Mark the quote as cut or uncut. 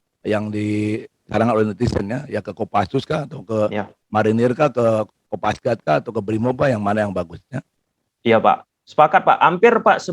uncut